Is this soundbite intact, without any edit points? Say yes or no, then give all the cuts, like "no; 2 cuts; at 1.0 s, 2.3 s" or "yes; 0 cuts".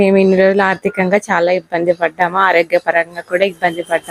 yes; 0 cuts